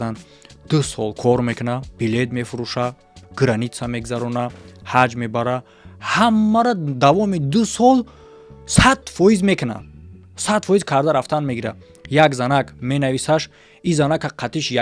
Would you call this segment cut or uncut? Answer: cut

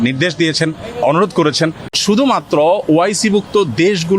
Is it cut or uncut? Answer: cut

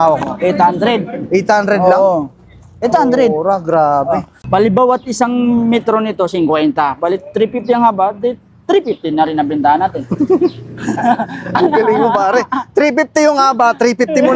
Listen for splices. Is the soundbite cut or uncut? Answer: cut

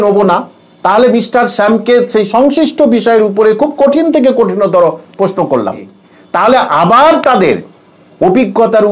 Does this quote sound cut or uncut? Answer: cut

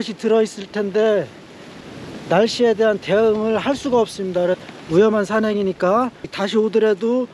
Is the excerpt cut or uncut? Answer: cut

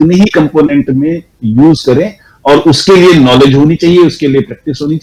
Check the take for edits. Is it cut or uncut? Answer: uncut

